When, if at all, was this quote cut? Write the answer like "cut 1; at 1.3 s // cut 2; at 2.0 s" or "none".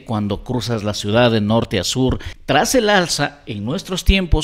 cut 1; at 2.3 s